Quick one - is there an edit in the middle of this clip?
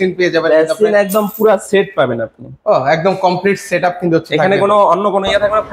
no; 0 cuts

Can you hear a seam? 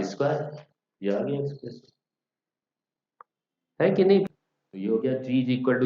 yes; 1 cut; at 4.2 s

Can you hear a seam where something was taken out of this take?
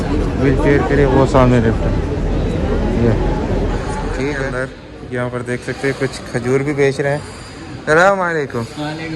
yes; 1 cut; at 4.5 s

